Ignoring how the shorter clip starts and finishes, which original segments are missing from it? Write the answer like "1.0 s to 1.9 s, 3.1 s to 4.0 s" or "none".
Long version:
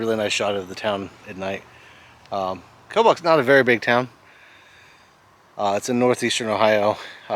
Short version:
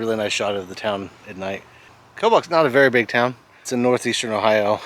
2.0 s to 2.7 s, 4.4 s to 5.8 s